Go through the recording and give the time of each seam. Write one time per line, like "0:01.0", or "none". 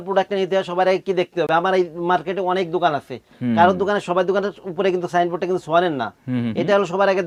none